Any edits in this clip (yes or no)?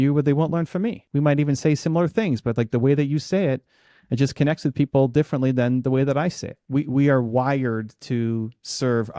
yes